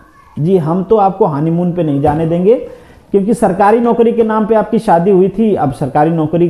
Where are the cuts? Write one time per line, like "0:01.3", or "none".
none